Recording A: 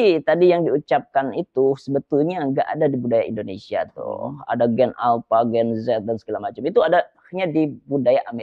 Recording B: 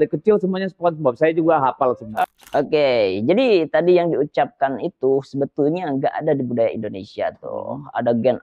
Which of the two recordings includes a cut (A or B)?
B